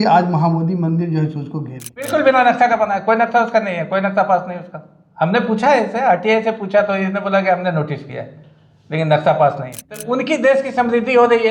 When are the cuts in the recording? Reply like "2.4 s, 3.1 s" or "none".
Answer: 2.1 s, 10.0 s